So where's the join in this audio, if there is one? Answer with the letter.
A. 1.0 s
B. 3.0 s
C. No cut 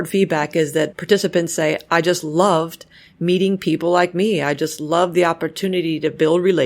A